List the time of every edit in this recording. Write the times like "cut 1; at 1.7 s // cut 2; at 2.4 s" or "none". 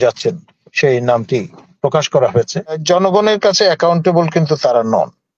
cut 1; at 2.8 s